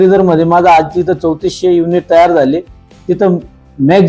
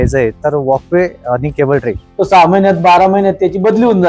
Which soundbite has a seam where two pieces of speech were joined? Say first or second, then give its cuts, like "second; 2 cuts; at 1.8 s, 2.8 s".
second; 1 cut; at 2.0 s